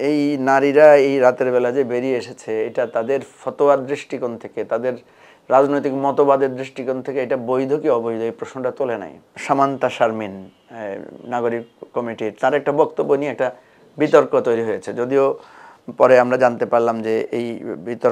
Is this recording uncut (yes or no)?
no